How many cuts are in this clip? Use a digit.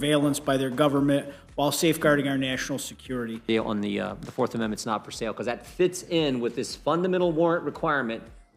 1